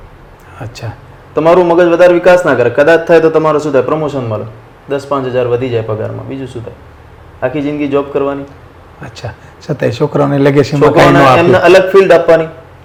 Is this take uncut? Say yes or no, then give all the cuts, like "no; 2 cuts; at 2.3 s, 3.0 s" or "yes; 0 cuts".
yes; 0 cuts